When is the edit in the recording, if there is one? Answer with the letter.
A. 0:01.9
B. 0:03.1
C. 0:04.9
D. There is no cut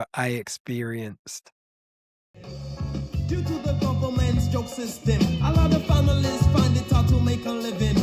A